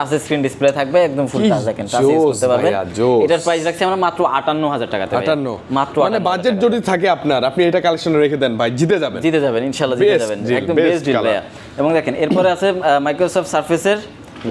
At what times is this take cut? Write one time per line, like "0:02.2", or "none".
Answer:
none

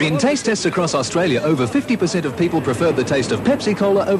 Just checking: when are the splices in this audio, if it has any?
none

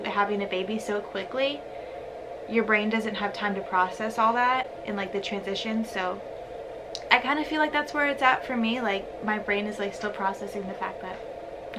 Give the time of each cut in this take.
none

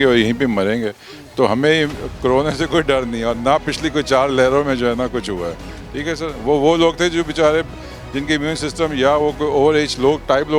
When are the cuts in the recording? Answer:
none

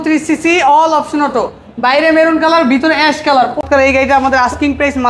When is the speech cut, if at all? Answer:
0:03.6

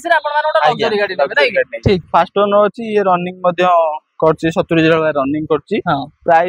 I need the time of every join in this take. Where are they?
0:02.0

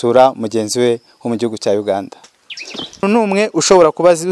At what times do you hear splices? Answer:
0:03.0

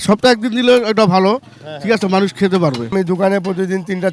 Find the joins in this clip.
0:02.9

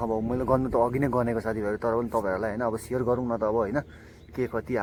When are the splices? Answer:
none

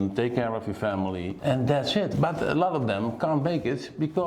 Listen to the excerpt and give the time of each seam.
0:01.3
0:02.1

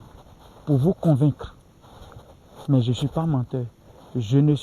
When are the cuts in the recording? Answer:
none

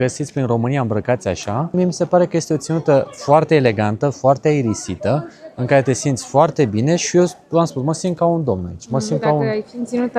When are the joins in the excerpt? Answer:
none

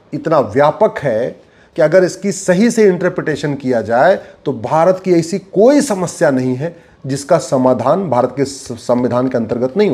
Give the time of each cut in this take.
none

